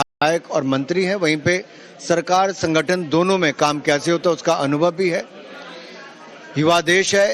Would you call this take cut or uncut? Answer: uncut